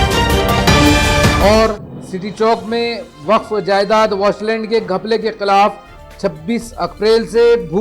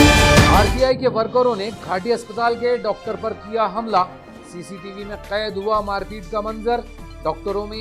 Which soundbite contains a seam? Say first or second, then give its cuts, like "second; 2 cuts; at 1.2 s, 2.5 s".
first; 1 cut; at 1.3 s